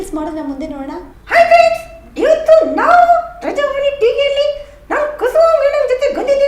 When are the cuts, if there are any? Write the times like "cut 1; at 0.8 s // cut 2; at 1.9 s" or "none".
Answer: cut 1; at 1.0 s

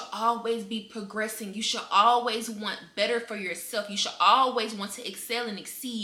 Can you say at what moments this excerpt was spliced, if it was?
none

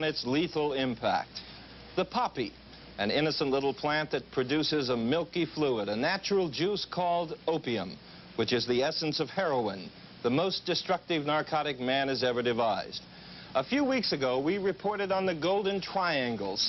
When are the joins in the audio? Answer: none

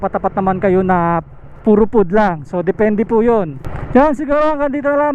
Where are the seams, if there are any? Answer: none

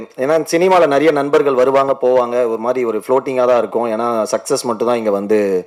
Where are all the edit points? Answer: none

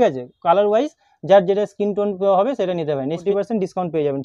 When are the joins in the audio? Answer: cut 1; at 3.2 s

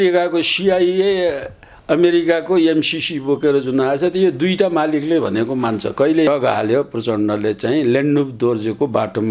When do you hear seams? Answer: cut 1; at 6.3 s

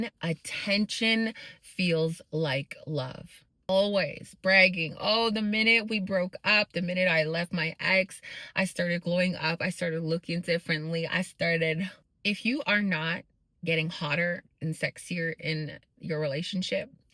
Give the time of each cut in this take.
cut 1; at 3.7 s

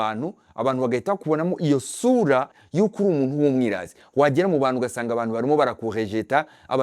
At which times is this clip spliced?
cut 1; at 2.6 s

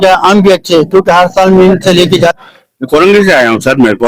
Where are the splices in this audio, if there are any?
cut 1; at 2.4 s

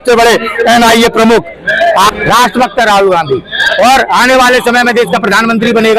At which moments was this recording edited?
cut 1; at 2.1 s

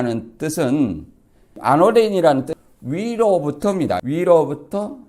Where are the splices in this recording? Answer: cut 1; at 1.5 s // cut 2; at 2.5 s // cut 3; at 4.0 s

